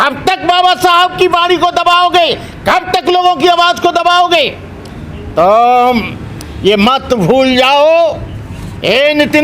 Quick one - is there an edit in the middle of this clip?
no; 0 cuts

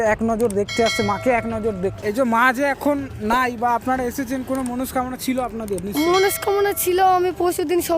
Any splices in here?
yes; 1 cut; at 2.0 s

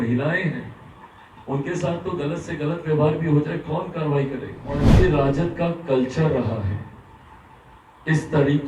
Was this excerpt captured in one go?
no; 1 cut; at 4.9 s

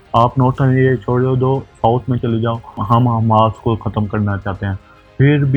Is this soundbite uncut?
yes; 0 cuts

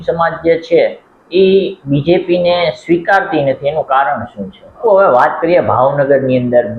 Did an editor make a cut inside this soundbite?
yes; 1 cut; at 4.8 s

